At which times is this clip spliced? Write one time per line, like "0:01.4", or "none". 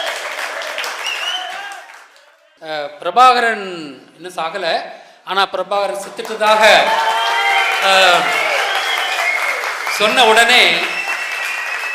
0:02.3